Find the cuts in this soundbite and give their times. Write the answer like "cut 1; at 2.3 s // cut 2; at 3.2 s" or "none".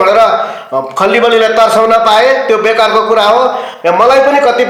none